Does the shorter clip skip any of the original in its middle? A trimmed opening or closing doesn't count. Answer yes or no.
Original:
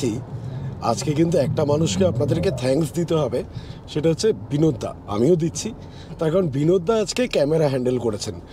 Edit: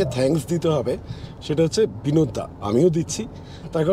no